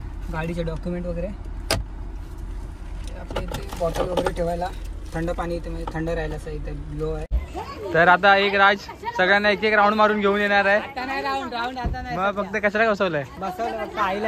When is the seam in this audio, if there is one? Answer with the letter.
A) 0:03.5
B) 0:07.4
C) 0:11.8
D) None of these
B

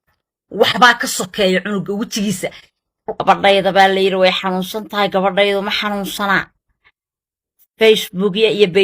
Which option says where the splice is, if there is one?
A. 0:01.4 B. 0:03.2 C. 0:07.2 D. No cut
B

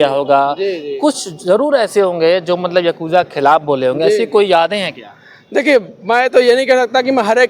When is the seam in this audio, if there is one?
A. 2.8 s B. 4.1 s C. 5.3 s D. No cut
D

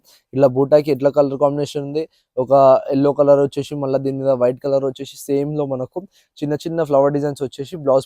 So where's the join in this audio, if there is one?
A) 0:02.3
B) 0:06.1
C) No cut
C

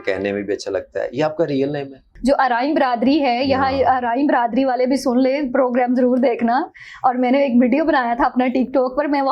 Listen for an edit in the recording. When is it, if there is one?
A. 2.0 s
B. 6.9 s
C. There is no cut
A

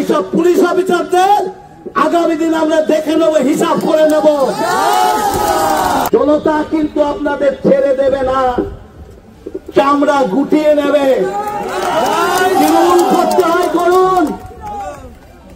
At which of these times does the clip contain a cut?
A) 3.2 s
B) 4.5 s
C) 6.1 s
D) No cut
C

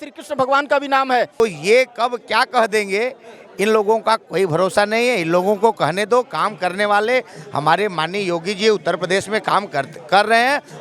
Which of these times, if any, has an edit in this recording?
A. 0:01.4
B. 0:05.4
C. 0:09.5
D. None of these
A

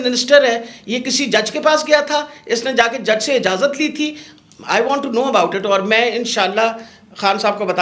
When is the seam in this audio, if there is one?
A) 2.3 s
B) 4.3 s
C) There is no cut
C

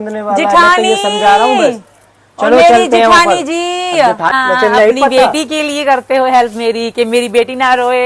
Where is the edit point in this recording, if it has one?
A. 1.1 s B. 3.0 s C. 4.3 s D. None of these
C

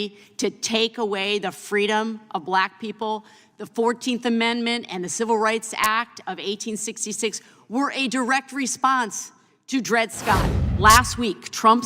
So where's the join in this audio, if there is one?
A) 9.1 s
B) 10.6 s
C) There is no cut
B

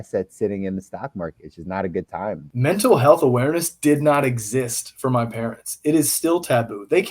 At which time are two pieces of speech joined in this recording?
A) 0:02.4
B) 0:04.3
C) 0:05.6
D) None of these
A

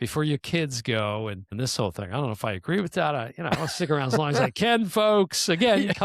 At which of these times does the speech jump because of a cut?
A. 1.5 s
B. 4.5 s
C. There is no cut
A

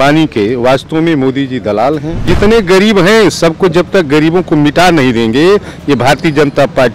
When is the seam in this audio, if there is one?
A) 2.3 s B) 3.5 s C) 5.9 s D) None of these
A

